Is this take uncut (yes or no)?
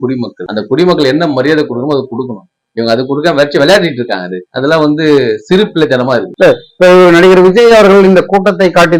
yes